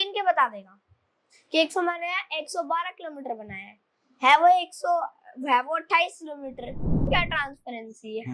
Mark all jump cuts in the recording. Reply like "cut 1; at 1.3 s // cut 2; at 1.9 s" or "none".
cut 1; at 7.1 s